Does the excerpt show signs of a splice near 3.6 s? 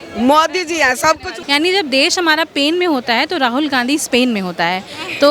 no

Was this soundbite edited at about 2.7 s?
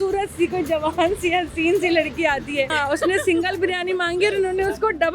yes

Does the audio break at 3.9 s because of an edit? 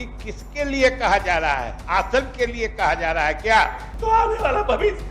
yes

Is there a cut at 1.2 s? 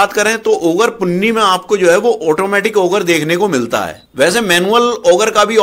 no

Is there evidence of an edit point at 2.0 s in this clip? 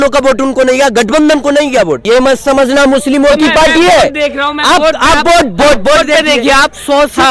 yes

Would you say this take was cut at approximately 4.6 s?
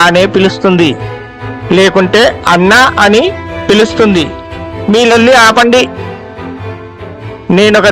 yes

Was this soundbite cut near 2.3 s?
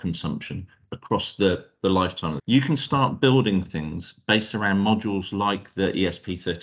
yes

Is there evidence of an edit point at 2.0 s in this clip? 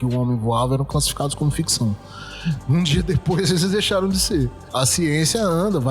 no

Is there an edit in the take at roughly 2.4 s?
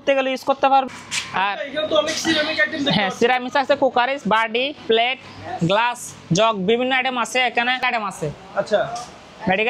no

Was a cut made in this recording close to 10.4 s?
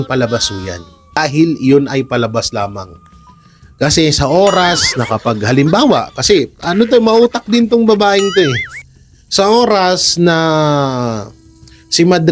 no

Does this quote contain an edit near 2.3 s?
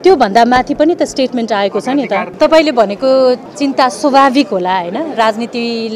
yes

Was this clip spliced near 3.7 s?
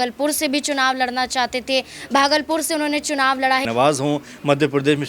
yes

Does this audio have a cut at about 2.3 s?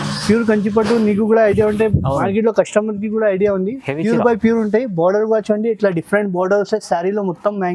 no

